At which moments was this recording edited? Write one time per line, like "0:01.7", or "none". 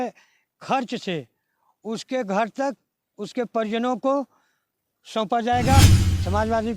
0:05.8